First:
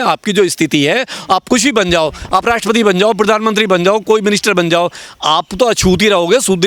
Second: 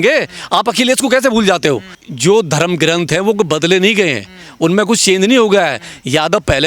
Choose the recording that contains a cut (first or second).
second